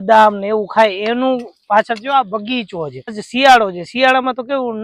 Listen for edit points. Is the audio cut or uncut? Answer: cut